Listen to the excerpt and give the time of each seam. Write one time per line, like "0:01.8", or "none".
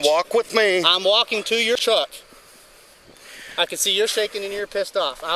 0:01.7